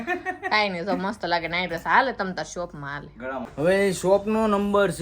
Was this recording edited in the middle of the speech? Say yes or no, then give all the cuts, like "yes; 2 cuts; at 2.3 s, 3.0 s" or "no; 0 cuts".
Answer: yes; 1 cut; at 3.5 s